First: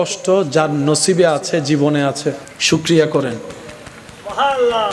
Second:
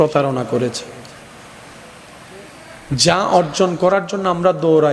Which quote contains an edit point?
first; 1 cut; at 2.5 s

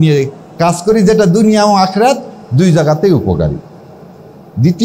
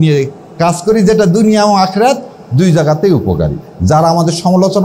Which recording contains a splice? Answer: second; 1 cut; at 3.7 s

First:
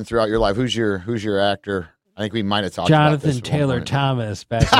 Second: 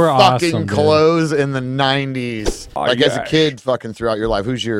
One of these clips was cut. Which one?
second; 1 cut; at 2.6 s

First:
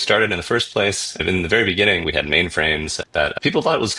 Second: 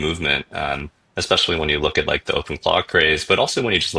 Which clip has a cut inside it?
first; 3 cuts; at 1.1 s, 2.0 s, 3.0 s

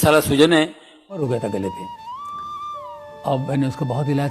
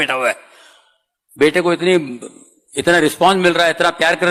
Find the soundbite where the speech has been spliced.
first; 1 cut; at 1.2 s

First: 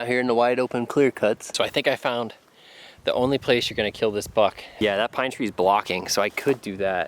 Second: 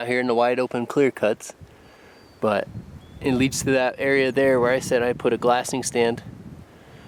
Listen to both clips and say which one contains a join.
first; 2 cuts; at 1.5 s, 4.8 s

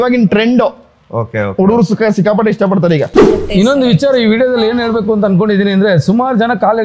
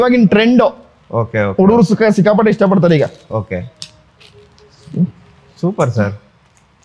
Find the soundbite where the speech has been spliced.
first; 1 cut; at 3.4 s

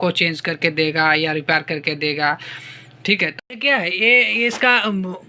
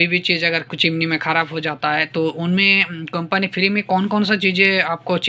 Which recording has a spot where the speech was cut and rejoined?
first; 1 cut; at 3.3 s

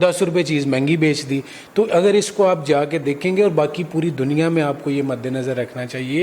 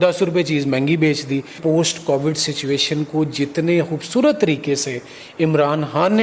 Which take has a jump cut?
second; 1 cut; at 1.6 s

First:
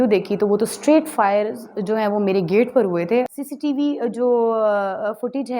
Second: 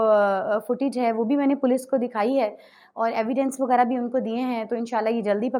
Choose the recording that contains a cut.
first; 1 cut; at 3.3 s

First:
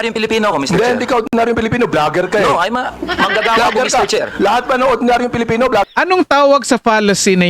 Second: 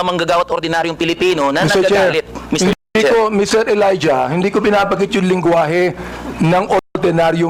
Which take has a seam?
first; 1 cut; at 5.9 s

